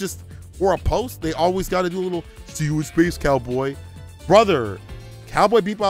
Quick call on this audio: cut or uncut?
uncut